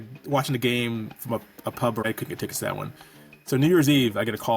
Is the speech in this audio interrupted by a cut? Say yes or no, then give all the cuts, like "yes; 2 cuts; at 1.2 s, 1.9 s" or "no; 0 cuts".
yes; 1 cut; at 2.0 s